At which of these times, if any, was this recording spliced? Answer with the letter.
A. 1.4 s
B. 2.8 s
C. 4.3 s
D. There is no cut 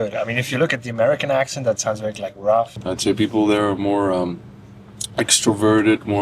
B